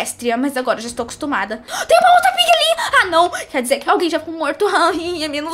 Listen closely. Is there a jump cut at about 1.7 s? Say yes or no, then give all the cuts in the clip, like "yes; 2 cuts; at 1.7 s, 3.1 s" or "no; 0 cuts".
yes; 2 cuts; at 1.7 s, 3.8 s